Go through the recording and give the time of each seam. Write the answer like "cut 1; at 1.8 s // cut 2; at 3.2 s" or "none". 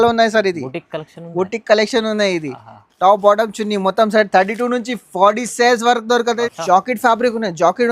cut 1; at 6.5 s